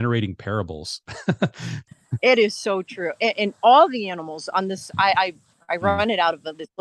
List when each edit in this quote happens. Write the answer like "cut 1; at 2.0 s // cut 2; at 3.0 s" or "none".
cut 1; at 1.7 s